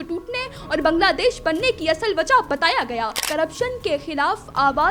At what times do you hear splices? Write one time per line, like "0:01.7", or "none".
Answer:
0:03.2

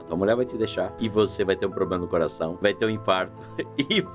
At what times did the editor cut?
0:00.9
0:02.5

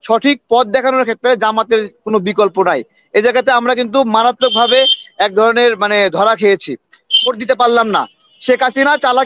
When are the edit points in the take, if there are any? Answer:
0:07.3

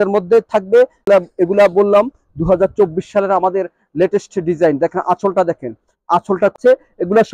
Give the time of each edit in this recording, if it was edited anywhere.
0:01.1
0:06.6

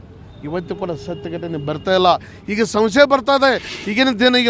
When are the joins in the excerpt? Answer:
none

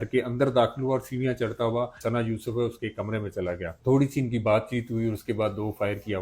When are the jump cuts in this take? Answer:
0:02.0
0:03.7

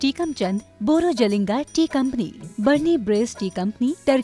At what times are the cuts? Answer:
none

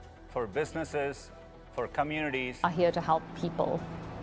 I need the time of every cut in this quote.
0:02.5

